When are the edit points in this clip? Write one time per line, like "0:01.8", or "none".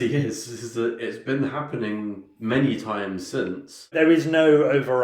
0:03.9

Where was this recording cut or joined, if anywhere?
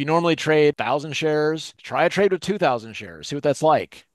0:00.8
0:01.7

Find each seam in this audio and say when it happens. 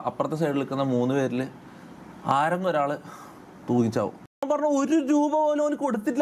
0:04.5

